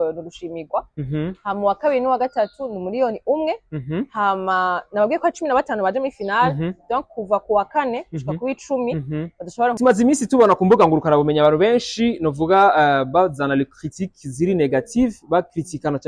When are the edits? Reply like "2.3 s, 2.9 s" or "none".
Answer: 9.8 s